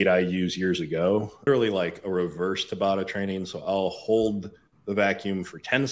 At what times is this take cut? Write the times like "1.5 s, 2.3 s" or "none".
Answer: 1.5 s